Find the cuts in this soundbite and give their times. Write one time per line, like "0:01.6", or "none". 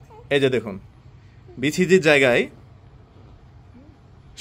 none